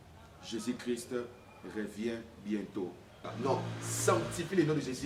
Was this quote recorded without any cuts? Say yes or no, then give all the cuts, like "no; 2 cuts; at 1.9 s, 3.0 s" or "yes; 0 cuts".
no; 1 cut; at 3.3 s